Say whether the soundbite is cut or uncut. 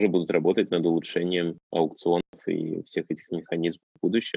cut